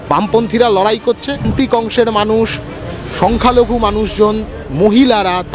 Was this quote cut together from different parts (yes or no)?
yes